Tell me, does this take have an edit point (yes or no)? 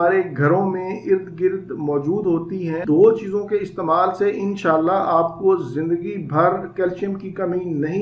yes